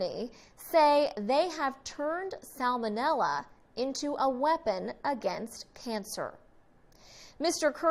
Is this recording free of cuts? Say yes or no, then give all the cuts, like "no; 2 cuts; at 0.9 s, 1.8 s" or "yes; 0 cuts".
yes; 0 cuts